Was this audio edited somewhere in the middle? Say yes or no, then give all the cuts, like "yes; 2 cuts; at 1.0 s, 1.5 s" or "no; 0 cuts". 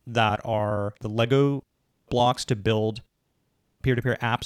yes; 1 cut; at 0.9 s